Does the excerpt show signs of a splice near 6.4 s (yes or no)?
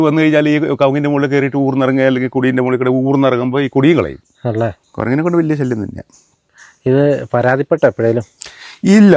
no